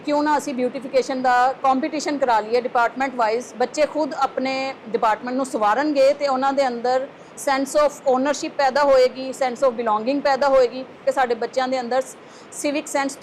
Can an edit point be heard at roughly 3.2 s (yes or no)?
no